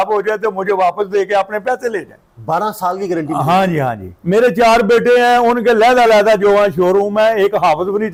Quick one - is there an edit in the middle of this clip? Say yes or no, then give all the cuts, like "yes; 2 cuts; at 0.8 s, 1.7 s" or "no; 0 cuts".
no; 0 cuts